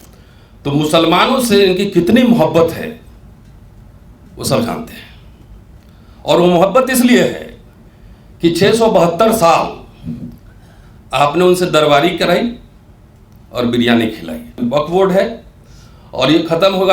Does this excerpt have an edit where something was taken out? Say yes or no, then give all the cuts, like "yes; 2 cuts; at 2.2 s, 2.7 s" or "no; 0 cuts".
yes; 1 cut; at 14.5 s